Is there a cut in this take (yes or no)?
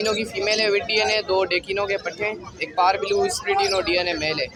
no